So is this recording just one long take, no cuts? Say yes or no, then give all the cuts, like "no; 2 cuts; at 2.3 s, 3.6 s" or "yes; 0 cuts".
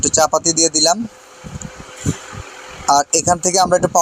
yes; 0 cuts